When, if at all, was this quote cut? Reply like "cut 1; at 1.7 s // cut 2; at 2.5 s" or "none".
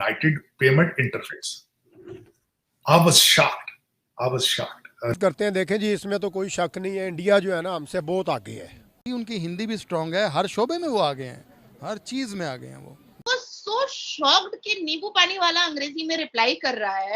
cut 1; at 5.1 s // cut 2; at 8.8 s // cut 3; at 13.2 s